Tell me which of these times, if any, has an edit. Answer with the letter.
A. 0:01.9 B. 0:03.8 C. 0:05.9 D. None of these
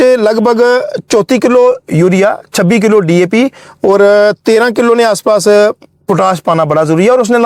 D